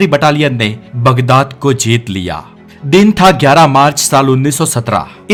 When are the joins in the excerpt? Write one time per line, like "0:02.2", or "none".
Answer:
none